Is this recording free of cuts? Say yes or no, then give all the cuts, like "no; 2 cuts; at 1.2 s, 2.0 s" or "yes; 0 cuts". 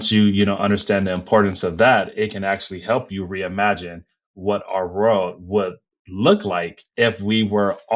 no; 1 cut; at 6.8 s